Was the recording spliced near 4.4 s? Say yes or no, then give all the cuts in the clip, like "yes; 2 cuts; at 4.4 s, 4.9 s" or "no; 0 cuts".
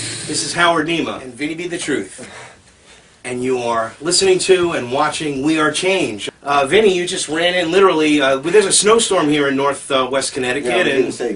yes; 1 cut; at 4.4 s